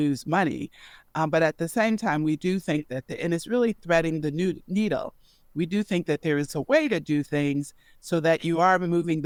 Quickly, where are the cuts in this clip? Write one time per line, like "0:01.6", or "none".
none